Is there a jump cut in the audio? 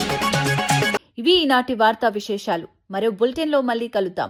no; 0 cuts

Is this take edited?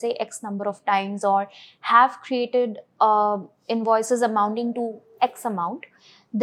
no; 0 cuts

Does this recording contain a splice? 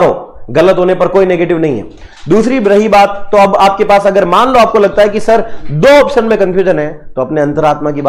no; 0 cuts

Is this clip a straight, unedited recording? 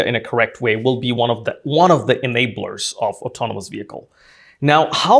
yes; 0 cuts

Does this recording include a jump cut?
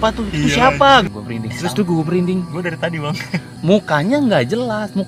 yes; 2 cuts; at 1.1 s, 3.6 s

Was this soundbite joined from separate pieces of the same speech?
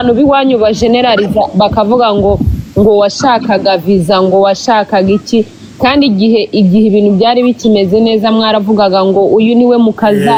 no; 0 cuts

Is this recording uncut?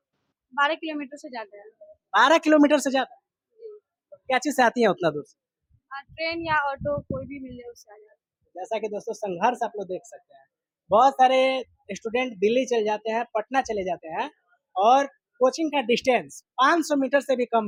yes; 0 cuts

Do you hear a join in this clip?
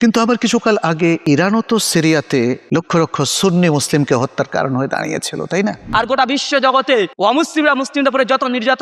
yes; 4 cuts; at 1.2 s, 2.6 s, 5.8 s, 7.1 s

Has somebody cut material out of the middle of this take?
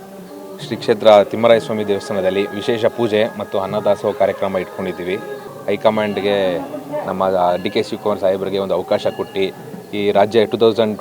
yes; 1 cut; at 5.5 s

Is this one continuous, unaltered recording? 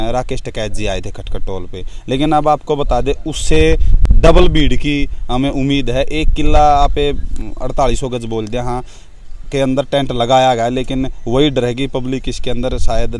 yes; 0 cuts

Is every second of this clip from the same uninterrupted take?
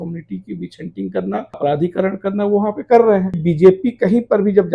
no; 2 cuts; at 1.6 s, 3.4 s

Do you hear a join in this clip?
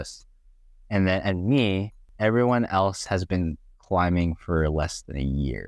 yes; 1 cut; at 2.0 s

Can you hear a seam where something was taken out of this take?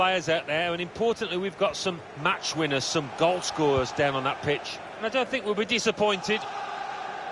yes; 1 cut; at 6.4 s

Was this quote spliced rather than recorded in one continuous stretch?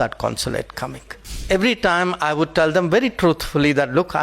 yes; 1 cut; at 1.4 s

